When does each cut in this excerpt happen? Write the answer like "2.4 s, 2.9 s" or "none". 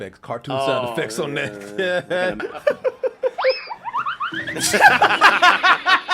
none